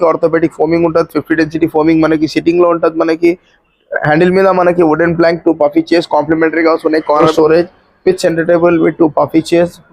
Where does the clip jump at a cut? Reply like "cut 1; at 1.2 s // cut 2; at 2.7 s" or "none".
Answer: cut 1; at 7.3 s